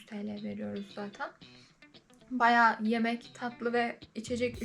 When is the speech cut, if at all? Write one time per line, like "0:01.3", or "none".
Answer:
none